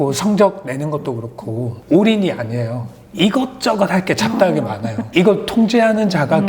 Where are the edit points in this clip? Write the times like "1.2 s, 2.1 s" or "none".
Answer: 1.7 s, 4.9 s